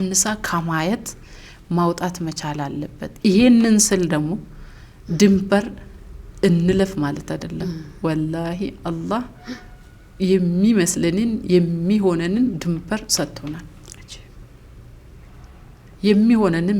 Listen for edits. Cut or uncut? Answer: uncut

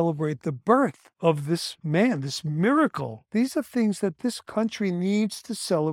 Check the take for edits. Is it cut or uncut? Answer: cut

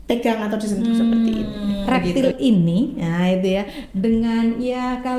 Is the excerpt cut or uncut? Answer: cut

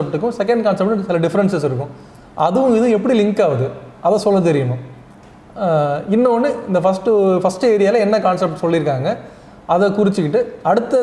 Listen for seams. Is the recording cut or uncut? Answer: uncut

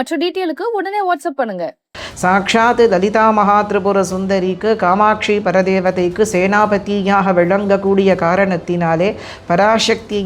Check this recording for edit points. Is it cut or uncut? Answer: cut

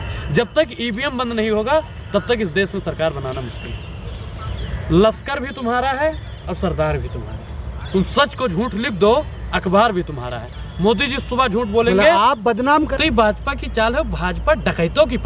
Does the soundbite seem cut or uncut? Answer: cut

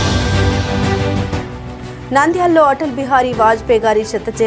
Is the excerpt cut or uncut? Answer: cut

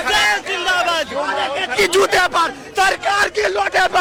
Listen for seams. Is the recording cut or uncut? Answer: uncut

